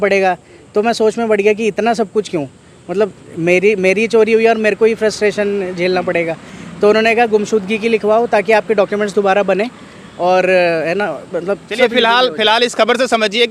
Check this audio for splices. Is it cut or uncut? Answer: uncut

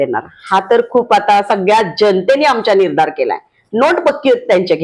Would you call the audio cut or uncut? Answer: uncut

